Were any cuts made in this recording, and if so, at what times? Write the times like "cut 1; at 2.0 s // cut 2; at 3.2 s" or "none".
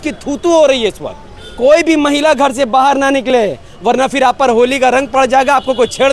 cut 1; at 1.5 s